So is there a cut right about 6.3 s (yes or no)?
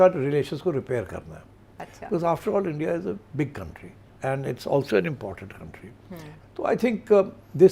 yes